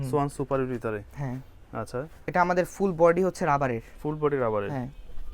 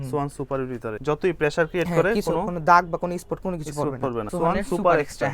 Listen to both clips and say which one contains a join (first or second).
second